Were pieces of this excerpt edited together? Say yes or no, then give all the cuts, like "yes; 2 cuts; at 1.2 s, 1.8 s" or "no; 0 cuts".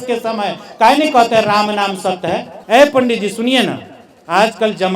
yes; 1 cut; at 2.5 s